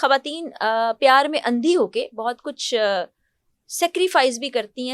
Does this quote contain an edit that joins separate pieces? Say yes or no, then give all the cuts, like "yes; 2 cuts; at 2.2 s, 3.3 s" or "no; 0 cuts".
no; 0 cuts